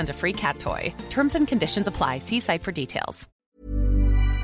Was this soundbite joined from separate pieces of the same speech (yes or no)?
yes